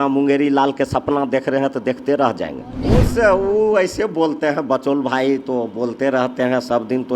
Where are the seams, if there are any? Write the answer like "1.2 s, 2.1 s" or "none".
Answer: 2.8 s